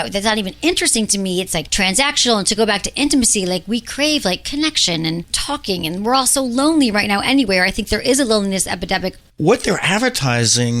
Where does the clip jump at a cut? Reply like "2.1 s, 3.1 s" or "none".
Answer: 1.7 s, 5.3 s, 9.3 s